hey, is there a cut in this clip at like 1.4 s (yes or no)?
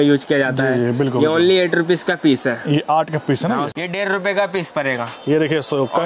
no